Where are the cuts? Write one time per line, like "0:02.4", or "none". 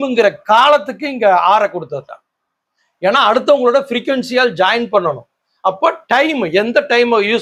none

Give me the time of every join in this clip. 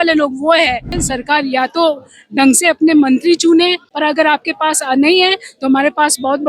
0:01.1
0:03.9

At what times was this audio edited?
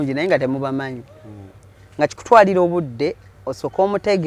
none

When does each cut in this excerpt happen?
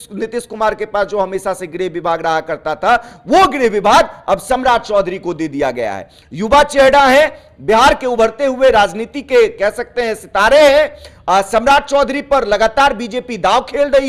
none

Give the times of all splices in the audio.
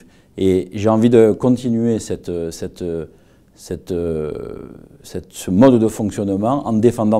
none

